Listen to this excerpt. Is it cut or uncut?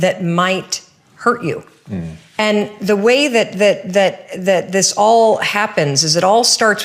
uncut